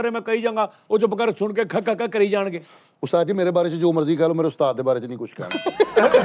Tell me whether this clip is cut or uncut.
uncut